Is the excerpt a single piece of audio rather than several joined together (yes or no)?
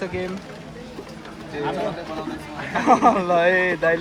yes